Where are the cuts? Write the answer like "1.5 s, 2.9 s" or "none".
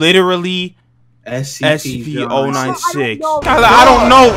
3.4 s